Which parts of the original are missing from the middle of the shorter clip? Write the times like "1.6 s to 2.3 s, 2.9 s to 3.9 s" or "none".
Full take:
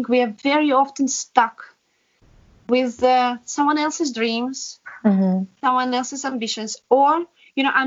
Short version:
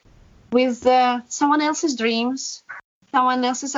5.0 s to 5.4 s